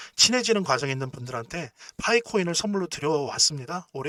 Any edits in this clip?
no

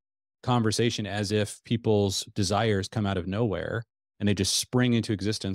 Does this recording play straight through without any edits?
yes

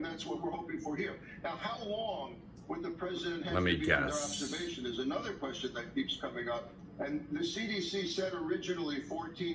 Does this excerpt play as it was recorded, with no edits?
no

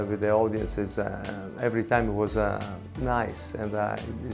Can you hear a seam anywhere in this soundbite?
no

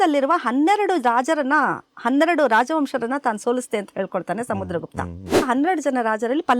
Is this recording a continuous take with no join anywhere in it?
no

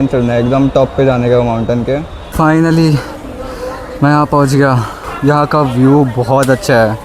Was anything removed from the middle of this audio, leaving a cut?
yes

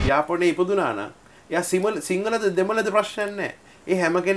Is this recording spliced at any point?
no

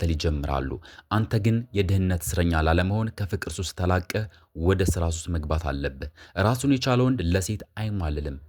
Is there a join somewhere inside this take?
no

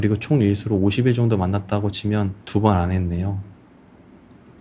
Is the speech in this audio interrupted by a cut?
no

